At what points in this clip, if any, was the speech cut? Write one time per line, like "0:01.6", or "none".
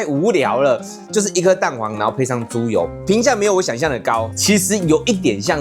0:04.3

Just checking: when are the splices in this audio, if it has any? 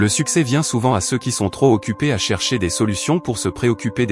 none

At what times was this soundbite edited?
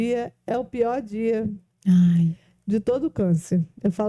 none

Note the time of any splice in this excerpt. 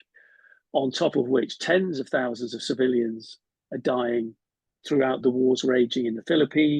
0:05.2

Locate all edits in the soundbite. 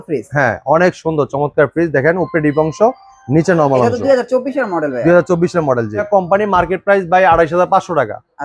none

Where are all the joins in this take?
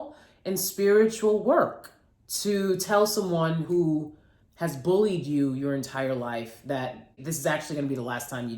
0:07.3

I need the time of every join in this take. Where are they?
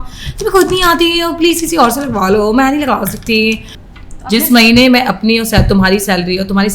0:03.8

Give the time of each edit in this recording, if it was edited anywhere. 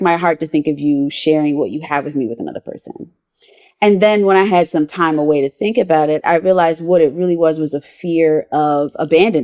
none

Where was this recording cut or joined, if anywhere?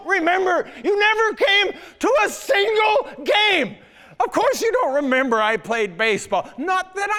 none

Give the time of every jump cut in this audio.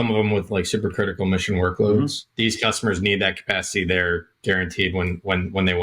0:02.2

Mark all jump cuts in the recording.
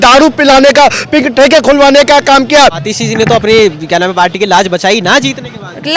0:02.9

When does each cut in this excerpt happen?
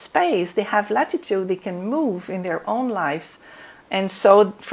none

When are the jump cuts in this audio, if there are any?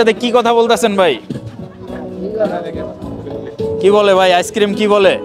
none

